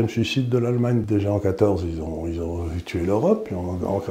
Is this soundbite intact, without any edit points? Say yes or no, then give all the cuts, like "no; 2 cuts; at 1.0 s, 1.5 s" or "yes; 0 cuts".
no; 1 cut; at 1.0 s